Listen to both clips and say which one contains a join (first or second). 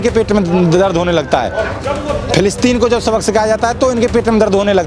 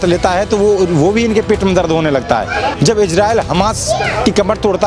second